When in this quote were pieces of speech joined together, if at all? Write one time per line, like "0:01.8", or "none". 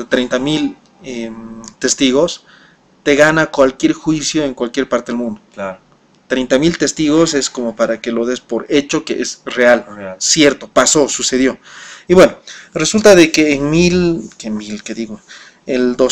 none